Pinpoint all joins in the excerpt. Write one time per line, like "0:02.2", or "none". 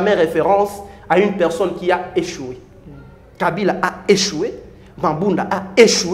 none

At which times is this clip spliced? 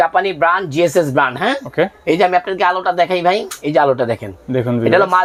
none

